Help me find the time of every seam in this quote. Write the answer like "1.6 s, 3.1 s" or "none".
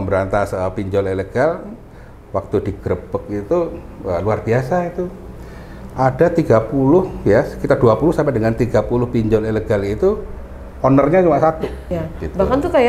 11.8 s